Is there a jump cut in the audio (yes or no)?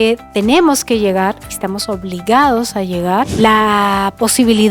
yes